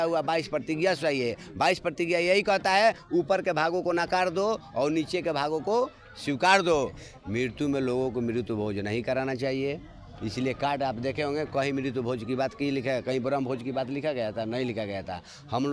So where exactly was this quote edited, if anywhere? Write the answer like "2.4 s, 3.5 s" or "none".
6.9 s